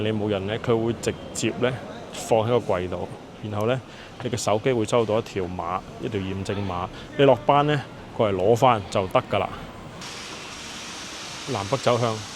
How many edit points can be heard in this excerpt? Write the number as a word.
one